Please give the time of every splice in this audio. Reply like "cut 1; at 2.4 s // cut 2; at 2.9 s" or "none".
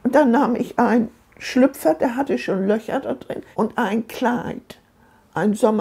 cut 1; at 3.4 s